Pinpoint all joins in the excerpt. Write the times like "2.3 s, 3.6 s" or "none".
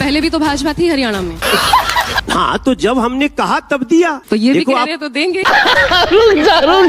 2.2 s

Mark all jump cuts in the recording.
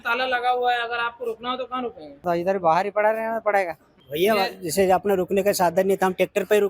2.2 s

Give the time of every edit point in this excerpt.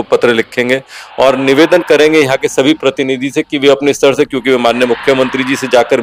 none

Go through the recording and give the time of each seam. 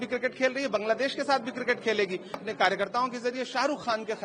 2.4 s

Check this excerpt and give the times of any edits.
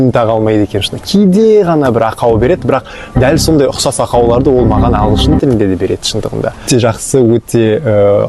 6.6 s

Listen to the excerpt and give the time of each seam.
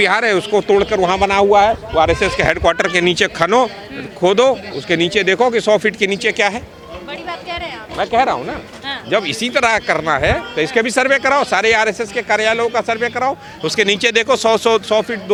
none

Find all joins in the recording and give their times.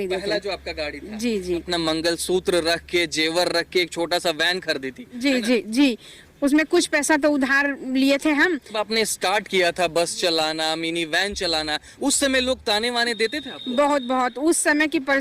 1.7 s, 8.8 s

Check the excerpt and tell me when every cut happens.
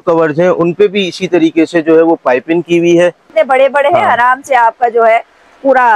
3.2 s

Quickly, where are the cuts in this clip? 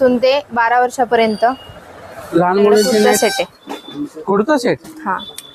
3.1 s

